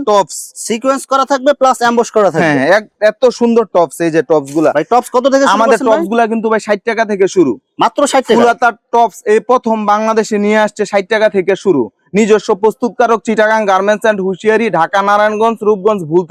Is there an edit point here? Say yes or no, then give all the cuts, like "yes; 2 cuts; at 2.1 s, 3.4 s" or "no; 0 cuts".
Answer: no; 0 cuts